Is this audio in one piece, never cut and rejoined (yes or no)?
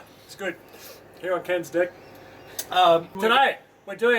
no